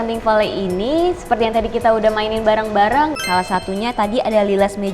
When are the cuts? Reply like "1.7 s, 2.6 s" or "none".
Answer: 3.2 s